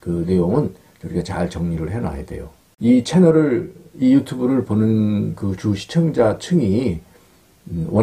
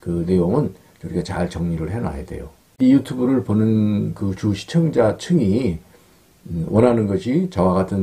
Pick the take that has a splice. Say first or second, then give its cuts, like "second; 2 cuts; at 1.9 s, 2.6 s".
second; 1 cut; at 2.6 s